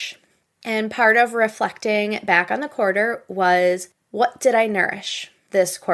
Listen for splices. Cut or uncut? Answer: uncut